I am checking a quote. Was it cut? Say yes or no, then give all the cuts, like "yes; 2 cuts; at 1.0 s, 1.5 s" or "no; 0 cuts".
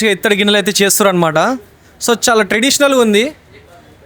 no; 0 cuts